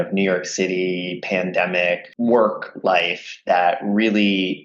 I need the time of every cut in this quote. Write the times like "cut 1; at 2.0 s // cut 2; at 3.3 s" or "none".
cut 1; at 2.1 s

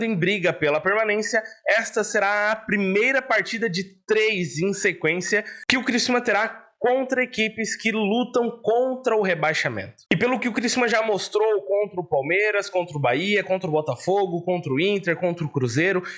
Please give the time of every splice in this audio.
cut 1; at 9.9 s

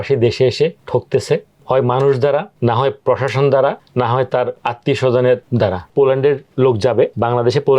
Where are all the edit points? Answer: cut 1; at 4.6 s // cut 2; at 5.7 s

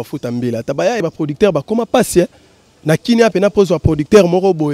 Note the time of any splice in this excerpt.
cut 1; at 1.0 s

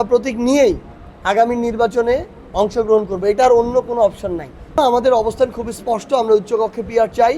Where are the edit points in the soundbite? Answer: cut 1; at 4.8 s

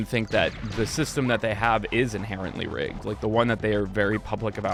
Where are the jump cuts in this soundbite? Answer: none

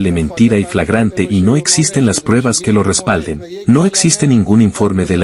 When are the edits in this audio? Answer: none

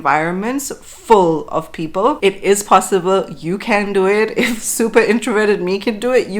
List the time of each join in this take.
cut 1; at 2.2 s

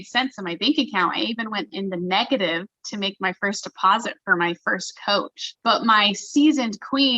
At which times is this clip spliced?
cut 1; at 5.4 s

